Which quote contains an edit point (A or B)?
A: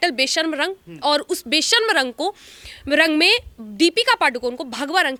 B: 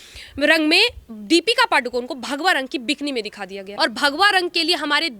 B